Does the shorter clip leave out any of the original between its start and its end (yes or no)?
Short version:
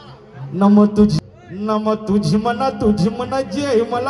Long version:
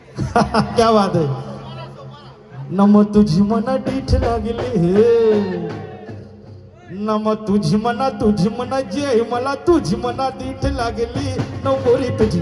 yes